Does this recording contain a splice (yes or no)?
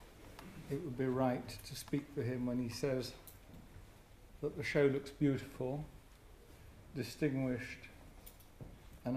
yes